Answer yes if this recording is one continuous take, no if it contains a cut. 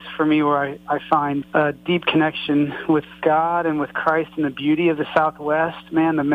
no